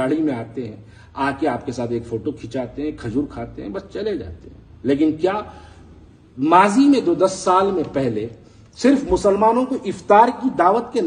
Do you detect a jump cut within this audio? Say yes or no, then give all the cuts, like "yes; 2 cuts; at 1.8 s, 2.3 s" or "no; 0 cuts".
no; 0 cuts